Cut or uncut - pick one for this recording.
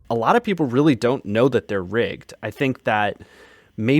uncut